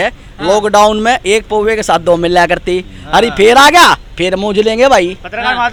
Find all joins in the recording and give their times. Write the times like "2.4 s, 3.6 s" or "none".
none